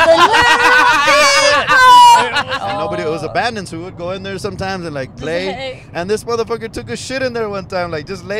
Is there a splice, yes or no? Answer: yes